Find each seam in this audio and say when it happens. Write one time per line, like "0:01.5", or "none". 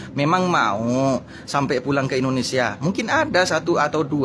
none